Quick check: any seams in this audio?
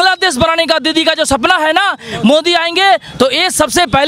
no; 0 cuts

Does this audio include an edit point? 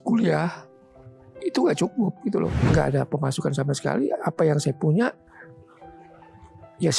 yes; 1 cut; at 2.6 s

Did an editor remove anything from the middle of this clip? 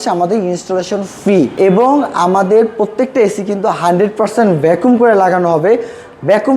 yes; 1 cut; at 1.5 s

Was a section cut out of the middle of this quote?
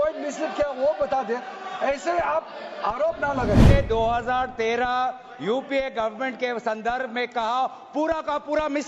yes; 1 cut; at 3.7 s

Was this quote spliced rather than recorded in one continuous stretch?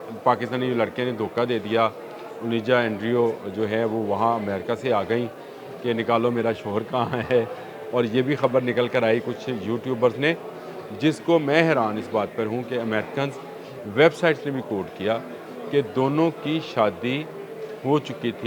no; 0 cuts

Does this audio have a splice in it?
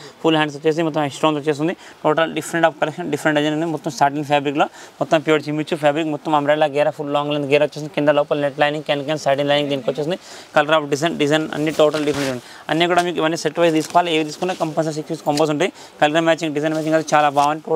no; 0 cuts

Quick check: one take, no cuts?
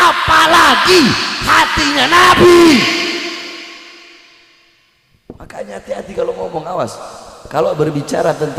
yes; 0 cuts

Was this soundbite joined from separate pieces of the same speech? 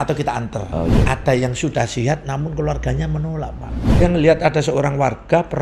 yes; 2 cuts; at 1.0 s, 4.0 s

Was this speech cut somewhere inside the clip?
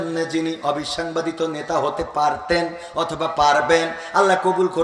no; 0 cuts

